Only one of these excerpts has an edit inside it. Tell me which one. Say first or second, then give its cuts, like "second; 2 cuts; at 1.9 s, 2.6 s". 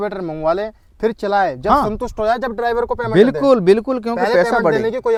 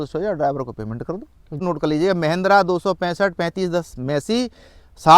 second; 1 cut; at 1.6 s